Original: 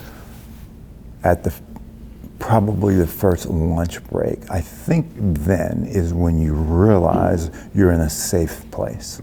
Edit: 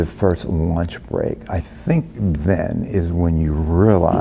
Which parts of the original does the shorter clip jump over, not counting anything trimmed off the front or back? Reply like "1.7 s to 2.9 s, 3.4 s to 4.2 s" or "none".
none